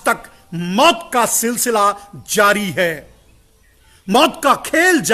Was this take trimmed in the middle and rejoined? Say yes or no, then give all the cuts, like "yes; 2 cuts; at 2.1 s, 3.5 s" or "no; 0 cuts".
no; 0 cuts